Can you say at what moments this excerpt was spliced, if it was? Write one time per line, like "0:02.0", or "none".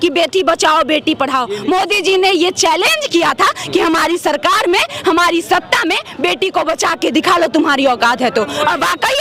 none